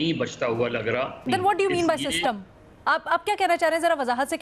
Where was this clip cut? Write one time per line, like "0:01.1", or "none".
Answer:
0:01.2